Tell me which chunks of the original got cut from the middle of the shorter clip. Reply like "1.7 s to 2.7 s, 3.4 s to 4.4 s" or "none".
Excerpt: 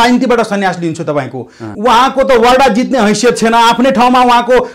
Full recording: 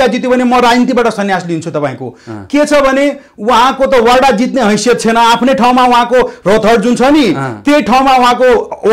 2.3 s to 3.3 s

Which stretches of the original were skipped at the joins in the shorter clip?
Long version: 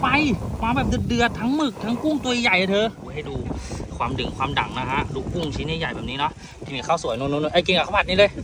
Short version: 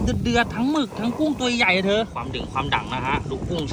3.0 s to 4.0 s

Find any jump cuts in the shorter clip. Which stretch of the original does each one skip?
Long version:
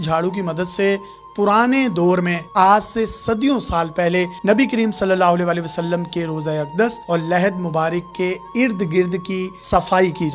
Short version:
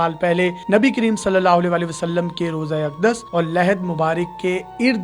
none

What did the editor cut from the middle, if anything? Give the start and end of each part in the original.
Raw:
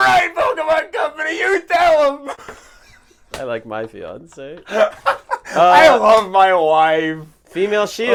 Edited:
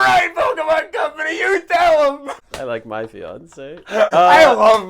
2.5 s to 3.3 s, 4.9 s to 5.5 s

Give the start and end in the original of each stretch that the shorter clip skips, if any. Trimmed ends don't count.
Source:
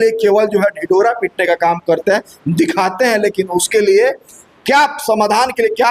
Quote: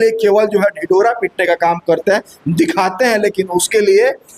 none

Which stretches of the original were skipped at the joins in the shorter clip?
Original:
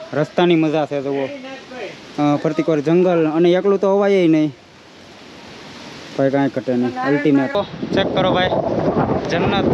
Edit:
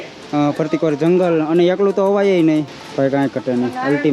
4.6 s to 6.0 s

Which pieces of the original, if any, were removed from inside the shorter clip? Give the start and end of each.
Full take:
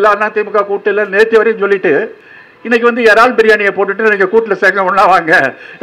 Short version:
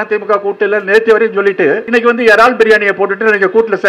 2.1 s to 2.6 s

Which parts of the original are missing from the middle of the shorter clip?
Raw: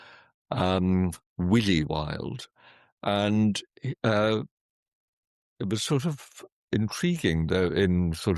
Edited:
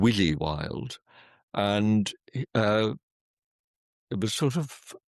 none

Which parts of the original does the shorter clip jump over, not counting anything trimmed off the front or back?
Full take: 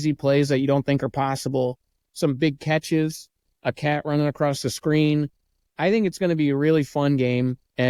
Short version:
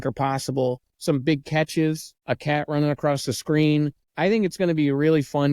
1.9 s to 2.0 s, 3.2 s to 3.5 s, 5.4 s to 5.6 s

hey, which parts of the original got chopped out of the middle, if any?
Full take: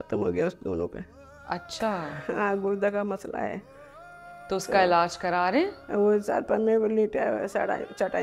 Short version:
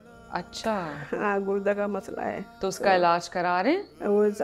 3.6 s to 4.4 s

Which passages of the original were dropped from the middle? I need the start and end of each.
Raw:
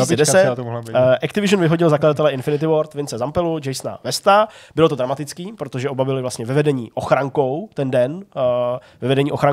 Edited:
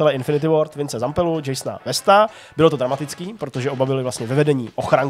none

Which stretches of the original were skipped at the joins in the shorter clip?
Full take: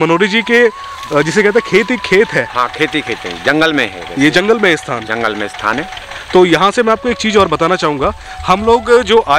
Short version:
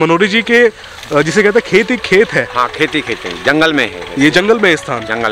none

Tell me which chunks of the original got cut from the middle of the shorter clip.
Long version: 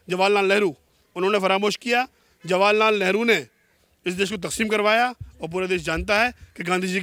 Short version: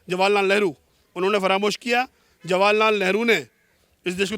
none

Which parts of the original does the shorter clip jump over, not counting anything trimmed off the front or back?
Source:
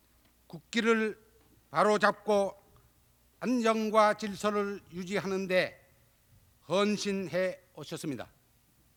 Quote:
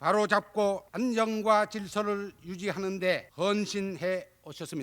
2.6 s to 3.4 s, 5.8 s to 6.6 s

